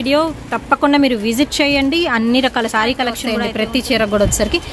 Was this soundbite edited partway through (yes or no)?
yes